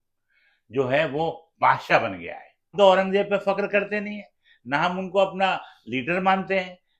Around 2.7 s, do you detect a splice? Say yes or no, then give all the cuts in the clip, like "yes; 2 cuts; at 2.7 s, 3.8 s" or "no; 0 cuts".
yes; 1 cut; at 2.7 s